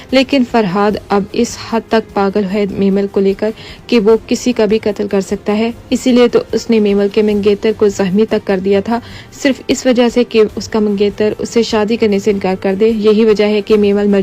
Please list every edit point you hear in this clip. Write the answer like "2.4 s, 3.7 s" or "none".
11.4 s